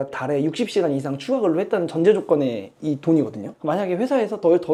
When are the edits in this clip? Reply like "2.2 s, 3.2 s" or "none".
none